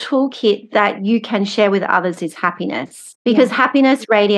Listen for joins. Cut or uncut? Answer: cut